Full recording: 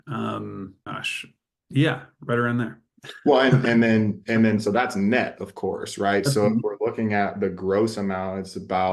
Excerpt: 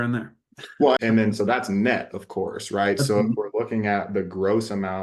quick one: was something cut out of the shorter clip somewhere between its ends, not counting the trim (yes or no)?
yes